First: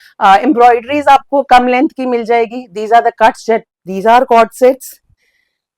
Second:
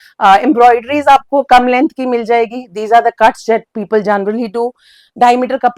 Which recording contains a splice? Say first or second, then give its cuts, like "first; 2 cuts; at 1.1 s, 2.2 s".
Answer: first; 1 cut; at 3.7 s